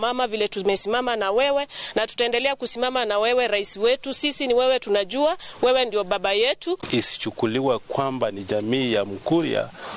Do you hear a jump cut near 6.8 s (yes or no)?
yes